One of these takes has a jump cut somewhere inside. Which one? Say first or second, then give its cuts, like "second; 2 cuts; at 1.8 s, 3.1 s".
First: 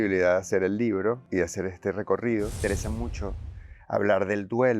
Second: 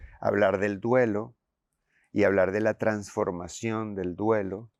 first; 2 cuts; at 1.2 s, 2.6 s